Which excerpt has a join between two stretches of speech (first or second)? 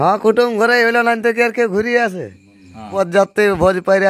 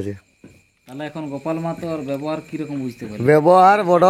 first